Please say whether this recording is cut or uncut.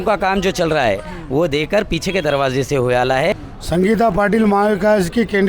cut